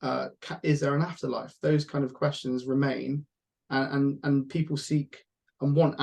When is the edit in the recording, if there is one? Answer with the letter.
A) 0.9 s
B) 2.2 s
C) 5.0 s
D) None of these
D